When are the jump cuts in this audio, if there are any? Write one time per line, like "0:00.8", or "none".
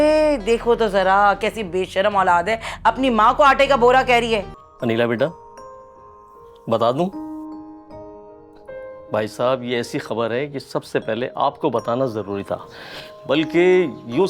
0:04.6